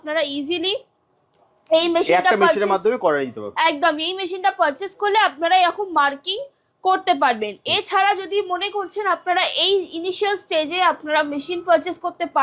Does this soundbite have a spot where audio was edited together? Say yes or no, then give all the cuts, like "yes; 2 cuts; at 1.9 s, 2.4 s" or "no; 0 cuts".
no; 0 cuts